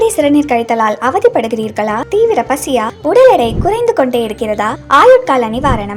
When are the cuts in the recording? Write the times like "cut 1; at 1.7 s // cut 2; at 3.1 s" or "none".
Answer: none